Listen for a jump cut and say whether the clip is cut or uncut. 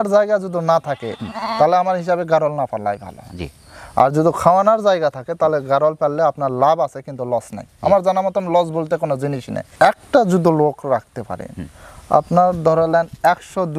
cut